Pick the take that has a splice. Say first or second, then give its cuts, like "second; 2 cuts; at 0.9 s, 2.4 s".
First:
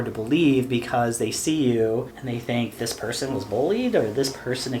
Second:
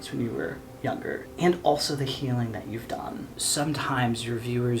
second; 2 cuts; at 0.9 s, 3.4 s